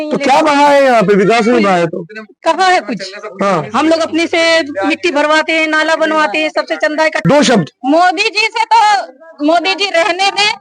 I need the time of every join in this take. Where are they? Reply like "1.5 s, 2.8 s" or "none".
7.2 s